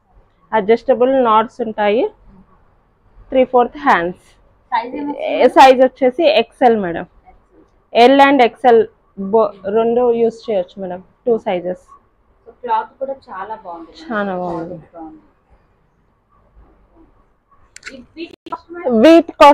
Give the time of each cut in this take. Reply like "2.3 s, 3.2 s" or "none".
none